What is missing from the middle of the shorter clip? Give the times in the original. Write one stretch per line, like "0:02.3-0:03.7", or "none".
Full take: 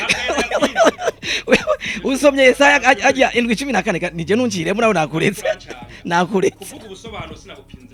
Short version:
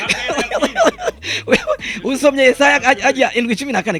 none